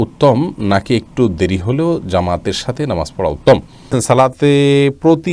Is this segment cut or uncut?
cut